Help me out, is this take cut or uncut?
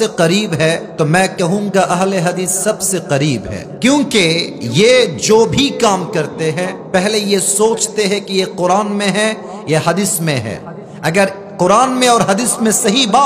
cut